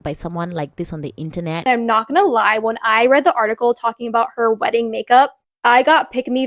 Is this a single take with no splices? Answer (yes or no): no